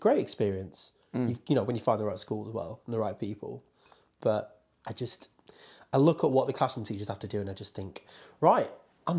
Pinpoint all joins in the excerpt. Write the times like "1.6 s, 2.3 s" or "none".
none

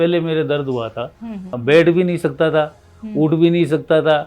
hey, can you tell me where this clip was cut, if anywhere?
1.5 s

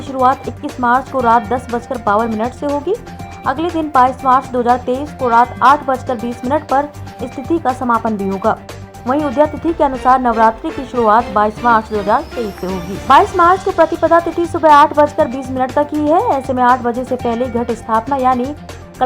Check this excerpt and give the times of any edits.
13.0 s

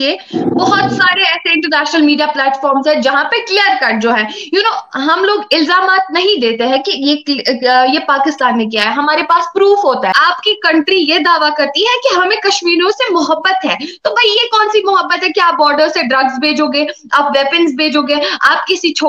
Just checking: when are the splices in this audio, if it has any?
10.1 s

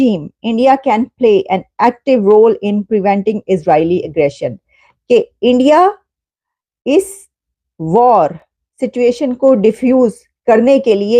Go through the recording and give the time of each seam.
none

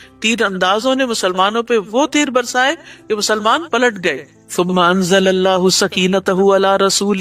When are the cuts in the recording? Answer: none

